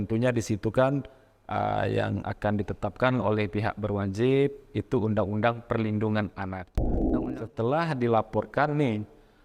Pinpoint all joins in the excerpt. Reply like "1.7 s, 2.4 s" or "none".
6.9 s